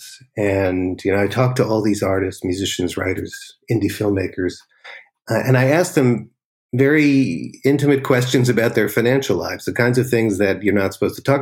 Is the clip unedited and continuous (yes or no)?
yes